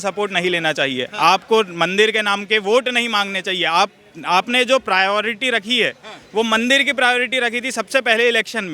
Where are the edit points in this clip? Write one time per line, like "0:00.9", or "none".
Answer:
none